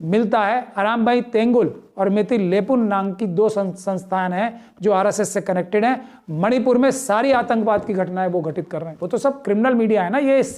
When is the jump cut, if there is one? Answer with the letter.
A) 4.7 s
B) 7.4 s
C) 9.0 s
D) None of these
C